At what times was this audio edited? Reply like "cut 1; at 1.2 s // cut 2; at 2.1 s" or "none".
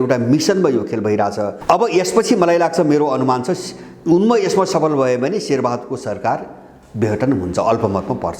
cut 1; at 1.6 s